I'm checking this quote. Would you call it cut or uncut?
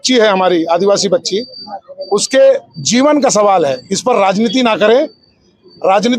uncut